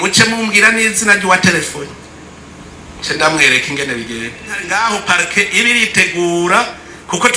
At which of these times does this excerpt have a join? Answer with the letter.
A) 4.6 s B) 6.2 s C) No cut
A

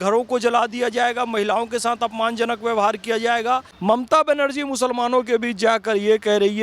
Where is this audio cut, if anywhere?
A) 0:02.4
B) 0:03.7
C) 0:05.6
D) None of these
B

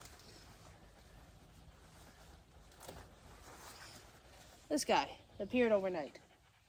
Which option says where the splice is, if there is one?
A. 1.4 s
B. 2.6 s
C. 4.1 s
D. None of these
D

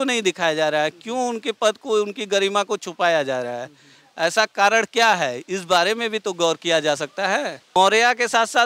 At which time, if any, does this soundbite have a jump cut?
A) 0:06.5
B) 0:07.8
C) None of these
B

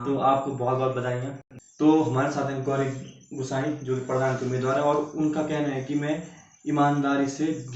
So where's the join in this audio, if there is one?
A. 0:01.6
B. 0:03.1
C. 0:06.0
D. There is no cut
A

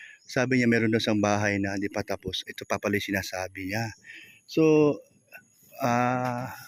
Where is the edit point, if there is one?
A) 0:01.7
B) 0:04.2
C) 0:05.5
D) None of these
D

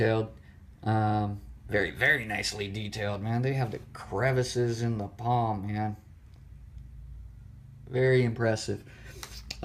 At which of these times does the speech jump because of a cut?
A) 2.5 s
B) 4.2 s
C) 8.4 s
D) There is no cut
A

